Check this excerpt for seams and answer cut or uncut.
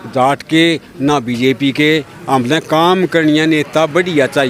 uncut